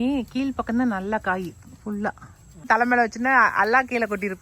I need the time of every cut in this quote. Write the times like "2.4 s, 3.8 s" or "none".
2.7 s

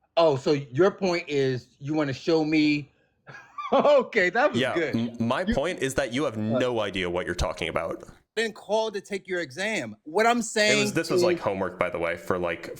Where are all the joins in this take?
8.4 s

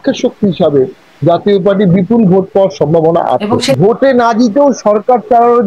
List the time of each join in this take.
3.7 s

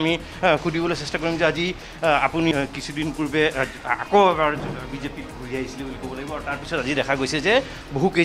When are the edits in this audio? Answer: 2.5 s

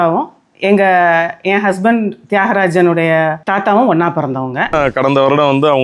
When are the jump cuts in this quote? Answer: 3.4 s, 4.7 s

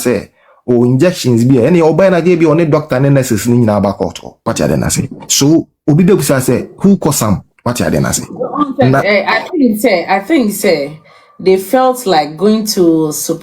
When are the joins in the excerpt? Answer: 4.3 s, 7.5 s

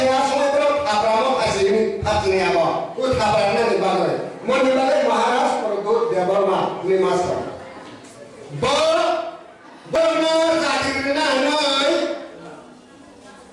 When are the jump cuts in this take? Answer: 10.0 s

